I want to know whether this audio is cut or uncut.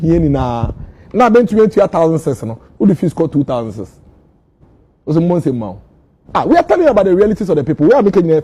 uncut